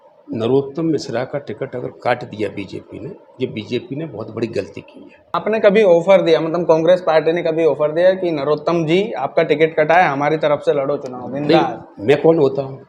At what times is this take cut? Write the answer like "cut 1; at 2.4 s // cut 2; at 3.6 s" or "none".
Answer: cut 1; at 5.3 s